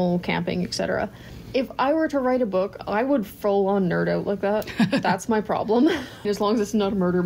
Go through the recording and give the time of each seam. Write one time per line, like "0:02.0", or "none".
0:06.3